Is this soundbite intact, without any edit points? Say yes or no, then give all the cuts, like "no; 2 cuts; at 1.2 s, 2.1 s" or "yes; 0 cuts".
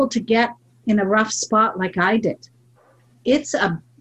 yes; 0 cuts